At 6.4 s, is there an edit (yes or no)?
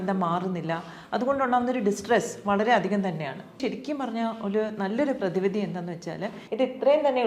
yes